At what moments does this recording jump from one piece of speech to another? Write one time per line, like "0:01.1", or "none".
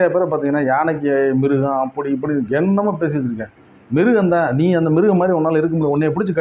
none